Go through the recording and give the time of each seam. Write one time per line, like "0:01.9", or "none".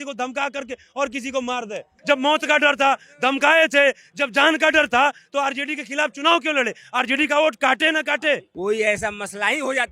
0:01.9
0:08.5

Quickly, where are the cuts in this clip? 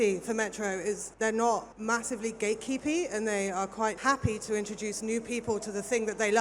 0:01.1
0:01.7
0:04.0

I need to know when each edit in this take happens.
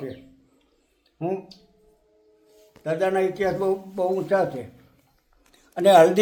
none

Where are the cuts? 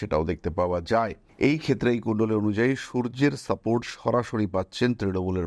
0:01.2

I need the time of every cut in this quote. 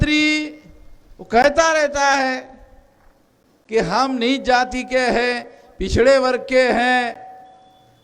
none

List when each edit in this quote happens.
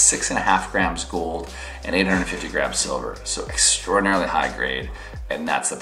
none

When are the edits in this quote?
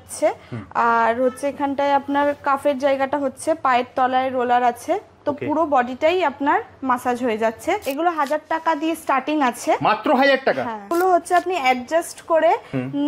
0:07.9
0:10.9

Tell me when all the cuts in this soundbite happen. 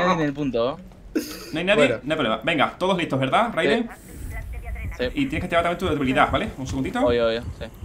none

